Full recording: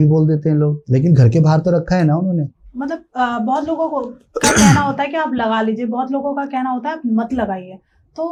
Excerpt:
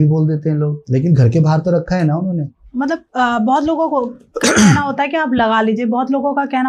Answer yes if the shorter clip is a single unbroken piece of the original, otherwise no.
yes